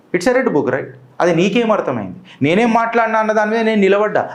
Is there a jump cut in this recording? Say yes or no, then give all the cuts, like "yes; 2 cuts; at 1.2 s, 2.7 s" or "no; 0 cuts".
no; 0 cuts